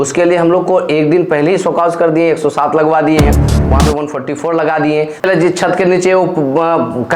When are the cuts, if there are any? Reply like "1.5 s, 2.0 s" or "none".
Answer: 5.3 s